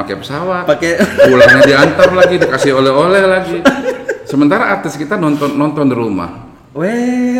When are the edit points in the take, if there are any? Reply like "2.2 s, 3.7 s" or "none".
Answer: none